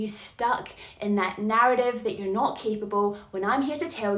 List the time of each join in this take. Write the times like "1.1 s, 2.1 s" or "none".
none